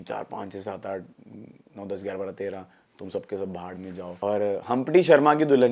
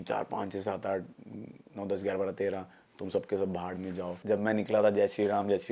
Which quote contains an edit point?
second; 1 cut; at 4.1 s

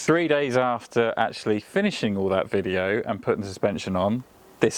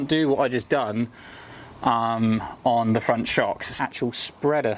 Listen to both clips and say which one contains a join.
second; 1 cut; at 3.8 s

